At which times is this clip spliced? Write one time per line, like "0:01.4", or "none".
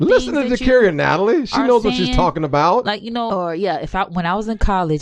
0:03.3

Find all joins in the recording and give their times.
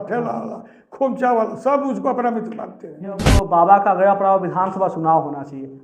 0:03.3

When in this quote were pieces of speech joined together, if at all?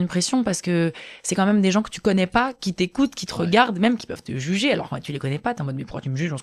none

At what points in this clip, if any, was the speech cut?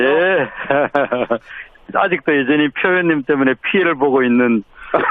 none

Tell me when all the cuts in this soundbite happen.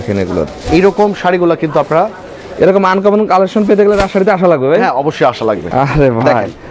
0:05.6

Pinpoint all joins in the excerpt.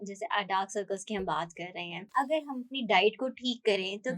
0:02.0

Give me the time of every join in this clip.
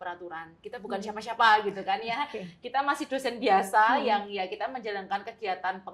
none

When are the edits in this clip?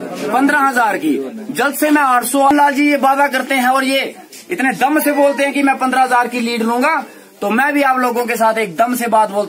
0:02.5

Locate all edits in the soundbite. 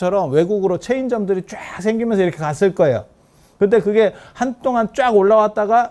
none

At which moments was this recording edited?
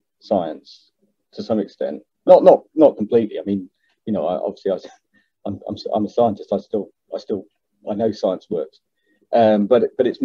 none

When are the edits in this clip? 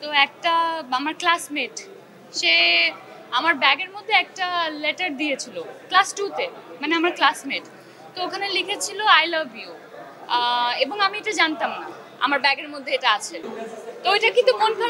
0:13.4

